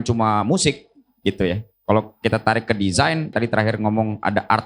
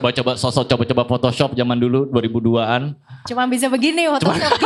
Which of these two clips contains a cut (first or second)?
first